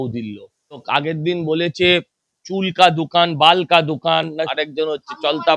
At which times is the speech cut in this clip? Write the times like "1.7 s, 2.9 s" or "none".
0.8 s, 4.5 s